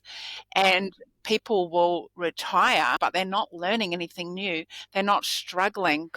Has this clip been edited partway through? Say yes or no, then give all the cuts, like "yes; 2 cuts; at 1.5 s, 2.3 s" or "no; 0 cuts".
yes; 1 cut; at 3.0 s